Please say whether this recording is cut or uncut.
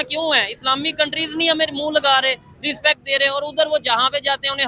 uncut